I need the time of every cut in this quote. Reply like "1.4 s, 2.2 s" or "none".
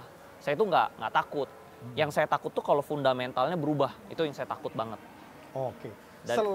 none